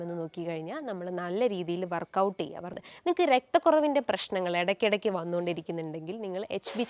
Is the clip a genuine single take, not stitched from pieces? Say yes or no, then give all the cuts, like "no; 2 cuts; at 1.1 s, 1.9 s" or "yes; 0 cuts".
no; 1 cut; at 2.7 s